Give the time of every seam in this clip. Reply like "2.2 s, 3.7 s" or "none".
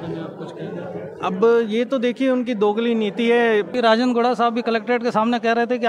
3.7 s